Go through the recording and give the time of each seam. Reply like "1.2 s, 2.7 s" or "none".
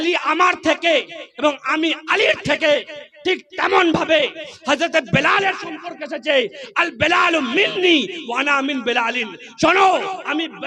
none